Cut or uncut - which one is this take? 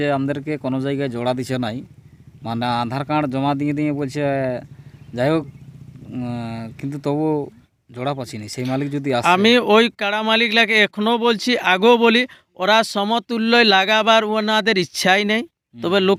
uncut